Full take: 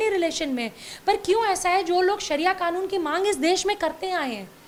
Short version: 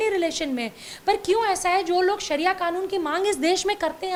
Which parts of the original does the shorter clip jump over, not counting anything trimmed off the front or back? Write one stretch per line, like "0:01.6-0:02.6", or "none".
none